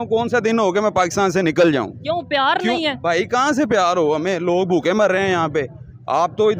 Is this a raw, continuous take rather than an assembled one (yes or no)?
yes